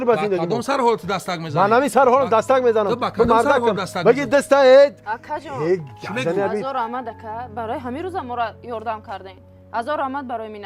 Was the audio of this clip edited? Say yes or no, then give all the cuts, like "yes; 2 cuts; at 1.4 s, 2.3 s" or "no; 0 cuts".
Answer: no; 0 cuts